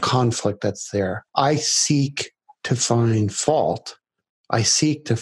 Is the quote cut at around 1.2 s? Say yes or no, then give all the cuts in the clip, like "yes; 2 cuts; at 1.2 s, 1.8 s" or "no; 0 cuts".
yes; 1 cut; at 1.2 s